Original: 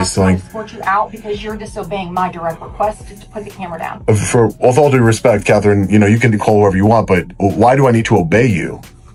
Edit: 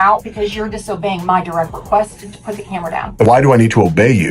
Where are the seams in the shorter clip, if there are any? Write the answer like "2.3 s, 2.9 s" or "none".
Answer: 3.2 s